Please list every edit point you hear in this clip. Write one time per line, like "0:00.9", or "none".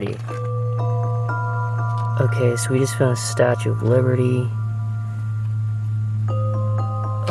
none